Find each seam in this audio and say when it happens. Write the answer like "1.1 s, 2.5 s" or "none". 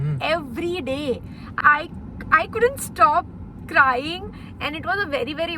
1.5 s